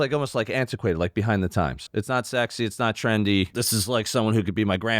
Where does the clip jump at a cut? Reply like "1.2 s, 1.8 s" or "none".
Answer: 1.9 s, 3.5 s